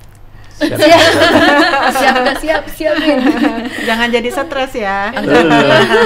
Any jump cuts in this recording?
no; 0 cuts

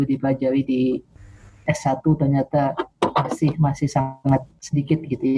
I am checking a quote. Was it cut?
no; 0 cuts

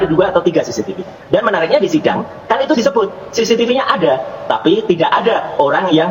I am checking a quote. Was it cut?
no; 0 cuts

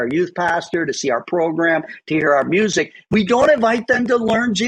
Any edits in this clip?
no; 0 cuts

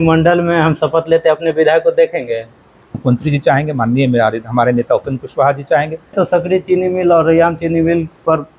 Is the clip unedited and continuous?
no; 2 cuts; at 3.0 s, 6.1 s

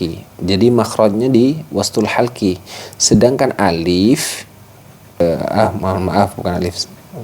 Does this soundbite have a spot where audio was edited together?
yes; 1 cut; at 5.2 s

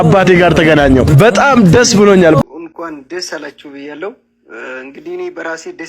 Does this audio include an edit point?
yes; 1 cut; at 2.4 s

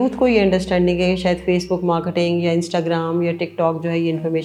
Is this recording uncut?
yes; 0 cuts

